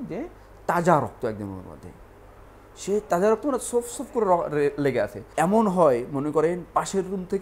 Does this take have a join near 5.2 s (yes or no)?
yes